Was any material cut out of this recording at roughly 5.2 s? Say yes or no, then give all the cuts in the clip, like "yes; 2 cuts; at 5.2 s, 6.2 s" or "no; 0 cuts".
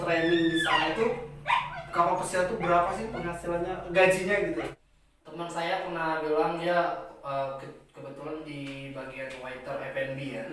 yes; 1 cut; at 5.2 s